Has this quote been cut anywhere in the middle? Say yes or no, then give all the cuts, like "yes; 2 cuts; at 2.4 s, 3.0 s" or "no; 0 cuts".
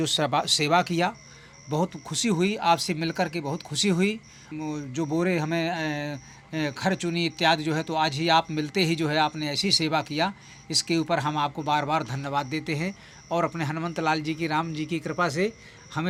no; 0 cuts